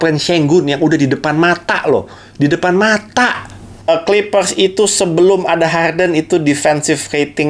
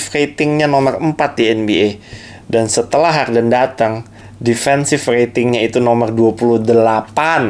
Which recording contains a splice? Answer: first; 1 cut; at 3.9 s

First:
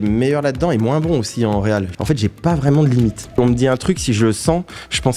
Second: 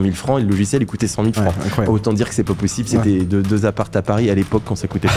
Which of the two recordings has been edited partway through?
first; 2 cuts; at 1.9 s, 3.4 s

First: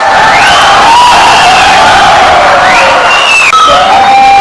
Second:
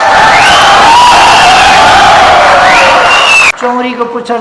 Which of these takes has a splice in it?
second; 1 cut; at 3.5 s

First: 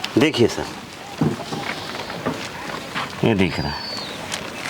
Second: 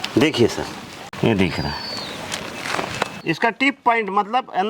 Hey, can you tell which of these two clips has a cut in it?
second; 2 cuts; at 1.0 s, 3.1 s

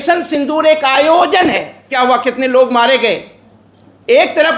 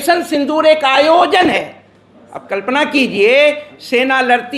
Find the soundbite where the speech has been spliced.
first; 1 cut; at 1.9 s

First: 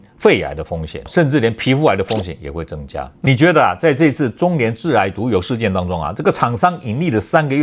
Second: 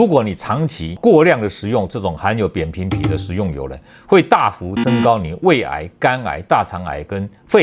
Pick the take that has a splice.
first; 1 cut; at 3.1 s

